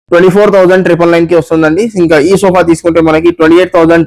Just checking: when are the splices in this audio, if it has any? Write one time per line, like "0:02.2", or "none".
none